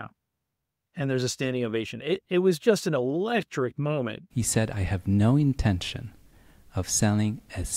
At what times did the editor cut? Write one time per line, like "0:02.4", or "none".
0:04.2